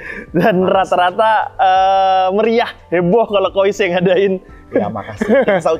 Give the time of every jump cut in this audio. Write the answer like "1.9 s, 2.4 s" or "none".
none